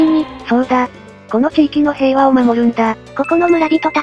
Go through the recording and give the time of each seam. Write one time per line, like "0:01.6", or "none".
0:03.0